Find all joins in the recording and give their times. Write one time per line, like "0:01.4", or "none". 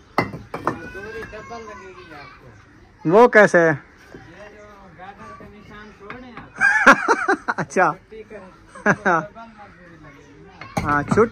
none